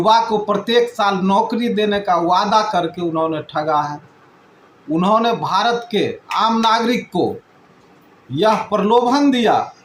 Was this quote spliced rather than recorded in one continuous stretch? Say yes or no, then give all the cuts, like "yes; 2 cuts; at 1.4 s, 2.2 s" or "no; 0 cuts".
no; 0 cuts